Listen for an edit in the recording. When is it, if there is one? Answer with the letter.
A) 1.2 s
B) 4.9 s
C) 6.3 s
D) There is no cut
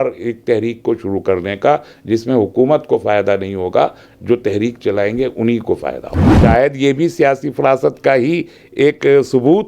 C